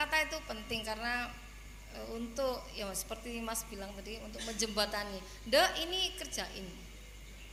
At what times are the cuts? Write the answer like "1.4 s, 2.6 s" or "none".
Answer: none